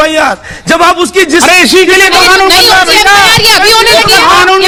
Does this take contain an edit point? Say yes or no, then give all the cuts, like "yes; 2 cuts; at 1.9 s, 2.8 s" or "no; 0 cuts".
no; 0 cuts